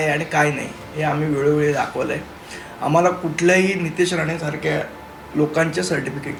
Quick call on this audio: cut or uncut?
uncut